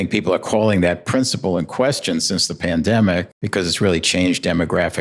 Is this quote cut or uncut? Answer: cut